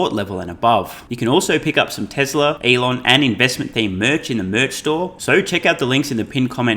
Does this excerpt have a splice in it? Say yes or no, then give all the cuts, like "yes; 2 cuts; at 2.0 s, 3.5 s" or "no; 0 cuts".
yes; 3 cuts; at 1.0 s, 2.6 s, 5.2 s